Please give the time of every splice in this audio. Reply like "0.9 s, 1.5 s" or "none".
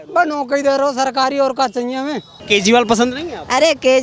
2.3 s